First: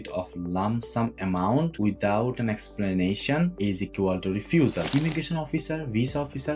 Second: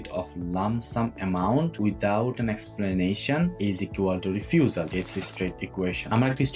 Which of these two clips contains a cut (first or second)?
first